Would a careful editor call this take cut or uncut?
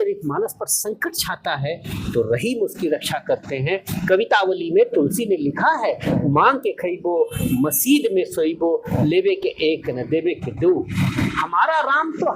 uncut